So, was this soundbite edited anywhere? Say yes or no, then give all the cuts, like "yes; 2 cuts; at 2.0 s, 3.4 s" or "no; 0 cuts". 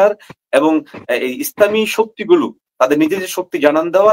no; 0 cuts